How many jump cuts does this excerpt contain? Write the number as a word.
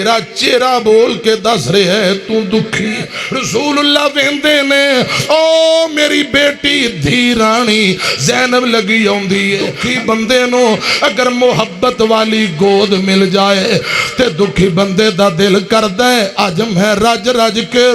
two